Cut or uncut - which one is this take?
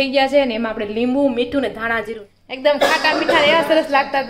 cut